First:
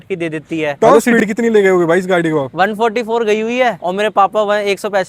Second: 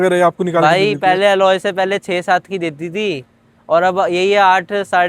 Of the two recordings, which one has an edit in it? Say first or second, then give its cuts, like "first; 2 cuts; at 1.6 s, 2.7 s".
first; 3 cuts; at 0.7 s, 2.5 s, 3.8 s